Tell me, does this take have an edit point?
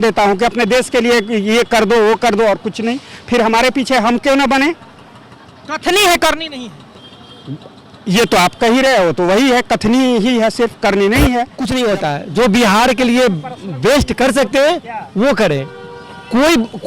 yes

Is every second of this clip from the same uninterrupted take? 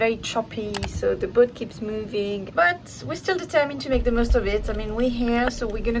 no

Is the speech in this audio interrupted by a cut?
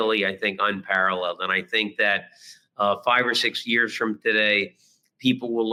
no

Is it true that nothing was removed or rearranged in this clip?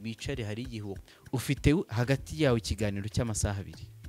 no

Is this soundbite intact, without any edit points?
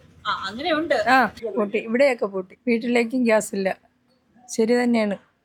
yes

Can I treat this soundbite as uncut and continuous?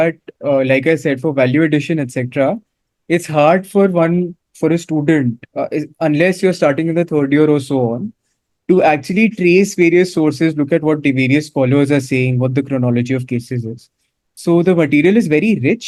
yes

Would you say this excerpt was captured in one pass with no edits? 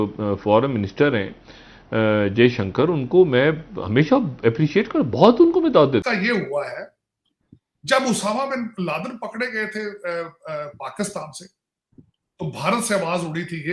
no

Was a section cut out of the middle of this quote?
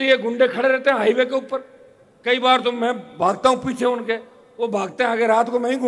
no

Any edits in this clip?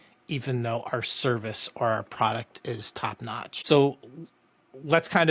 yes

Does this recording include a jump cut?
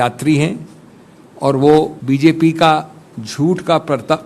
yes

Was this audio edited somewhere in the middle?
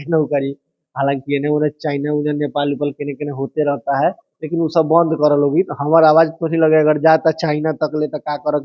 no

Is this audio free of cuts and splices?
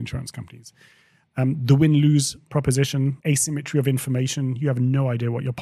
no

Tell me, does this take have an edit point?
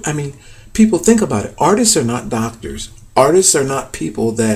no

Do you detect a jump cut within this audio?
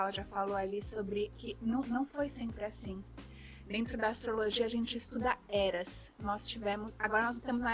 no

